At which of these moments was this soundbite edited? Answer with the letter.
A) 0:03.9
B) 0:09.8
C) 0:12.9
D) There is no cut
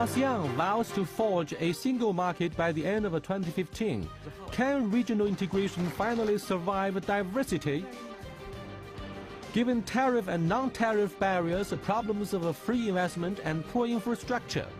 A